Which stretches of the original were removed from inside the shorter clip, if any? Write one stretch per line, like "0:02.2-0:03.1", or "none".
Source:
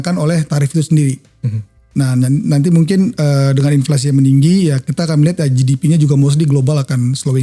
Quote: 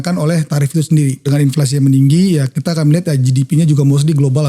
0:01.2-0:03.6